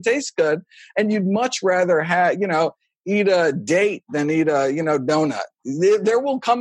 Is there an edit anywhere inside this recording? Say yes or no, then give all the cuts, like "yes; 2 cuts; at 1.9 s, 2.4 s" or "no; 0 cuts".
no; 0 cuts